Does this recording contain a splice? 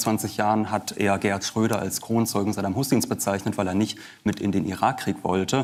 no; 0 cuts

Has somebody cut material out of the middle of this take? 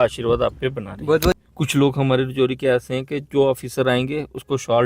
yes; 1 cut; at 1.3 s

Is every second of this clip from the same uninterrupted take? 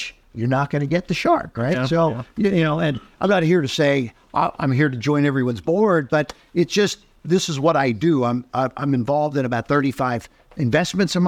yes; 0 cuts

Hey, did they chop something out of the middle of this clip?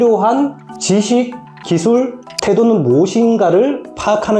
no; 0 cuts

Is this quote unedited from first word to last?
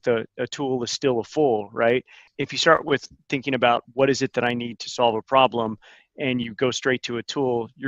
no; 1 cut; at 2.2 s

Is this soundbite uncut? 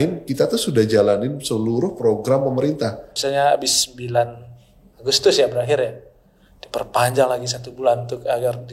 no; 1 cut; at 3.1 s

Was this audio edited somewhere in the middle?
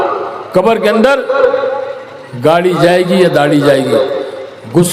no; 0 cuts

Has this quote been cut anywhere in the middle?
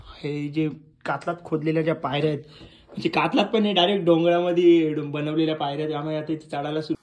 no; 0 cuts

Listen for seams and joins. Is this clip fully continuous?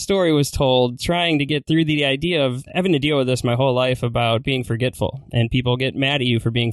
no; 2 cuts; at 1.6 s, 2.6 s

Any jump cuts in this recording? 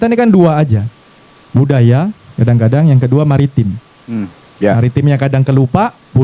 no; 0 cuts

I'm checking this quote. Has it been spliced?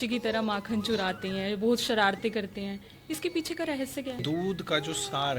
yes; 1 cut; at 4.2 s

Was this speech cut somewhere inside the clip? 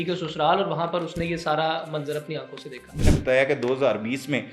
yes; 1 cut; at 2.9 s

